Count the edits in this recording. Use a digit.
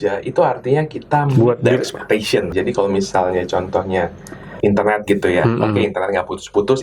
1